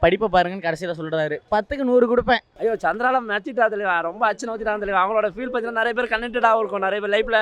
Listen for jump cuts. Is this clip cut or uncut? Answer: cut